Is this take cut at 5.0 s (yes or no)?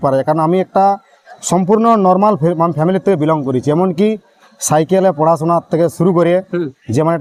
no